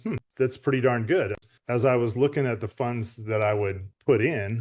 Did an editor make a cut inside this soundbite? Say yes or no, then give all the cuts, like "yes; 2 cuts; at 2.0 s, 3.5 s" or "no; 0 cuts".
yes; 1 cut; at 1.5 s